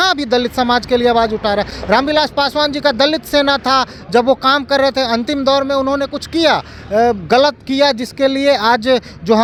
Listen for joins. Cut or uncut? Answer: uncut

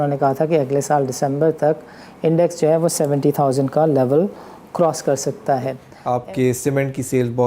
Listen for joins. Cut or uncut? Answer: cut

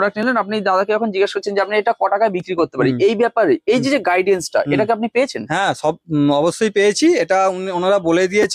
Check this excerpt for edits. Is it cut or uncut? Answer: uncut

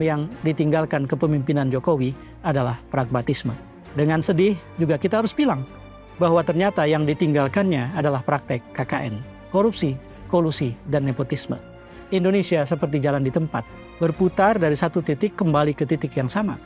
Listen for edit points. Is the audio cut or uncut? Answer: uncut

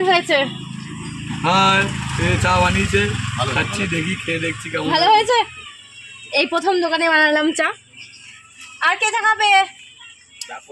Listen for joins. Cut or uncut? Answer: uncut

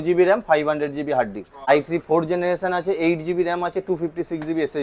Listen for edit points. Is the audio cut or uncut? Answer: cut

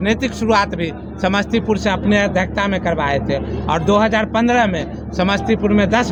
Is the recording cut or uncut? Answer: uncut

